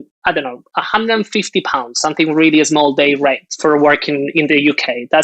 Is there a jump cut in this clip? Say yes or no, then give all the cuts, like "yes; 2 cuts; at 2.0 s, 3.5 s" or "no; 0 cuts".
yes; 1 cut; at 3.5 s